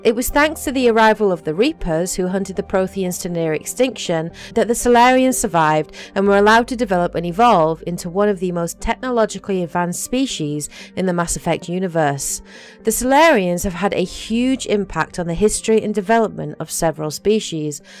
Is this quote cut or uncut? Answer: uncut